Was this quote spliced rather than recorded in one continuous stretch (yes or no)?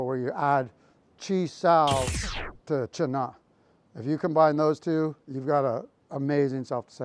yes